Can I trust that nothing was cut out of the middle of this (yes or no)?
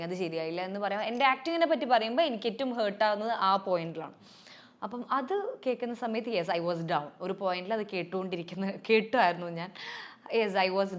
yes